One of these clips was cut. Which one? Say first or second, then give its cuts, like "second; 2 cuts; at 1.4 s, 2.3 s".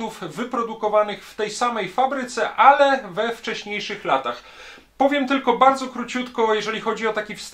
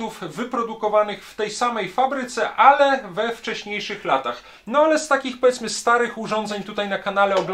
second; 1 cut; at 4.5 s